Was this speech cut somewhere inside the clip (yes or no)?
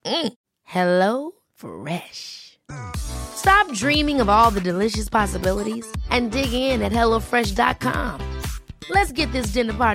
no